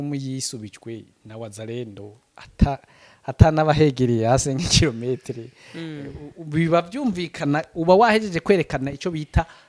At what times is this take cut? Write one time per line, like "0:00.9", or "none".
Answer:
none